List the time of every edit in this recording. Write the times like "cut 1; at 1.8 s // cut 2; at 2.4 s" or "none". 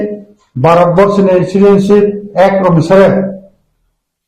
cut 1; at 2.2 s